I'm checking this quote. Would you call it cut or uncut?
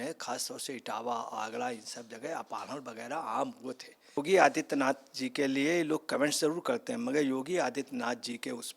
cut